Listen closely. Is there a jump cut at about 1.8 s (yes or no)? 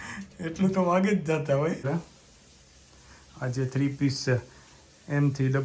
yes